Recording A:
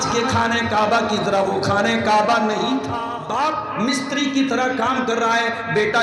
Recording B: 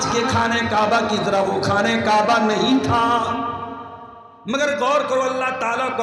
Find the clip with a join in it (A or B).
A